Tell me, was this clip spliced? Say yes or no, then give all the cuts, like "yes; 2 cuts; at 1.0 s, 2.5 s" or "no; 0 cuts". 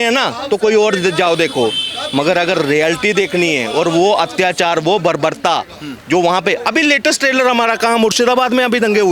no; 0 cuts